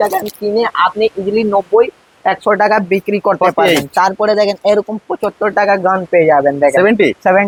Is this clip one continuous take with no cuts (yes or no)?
yes